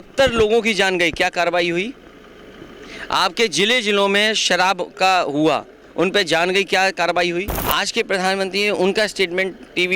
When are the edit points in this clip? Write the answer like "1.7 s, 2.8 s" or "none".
7.6 s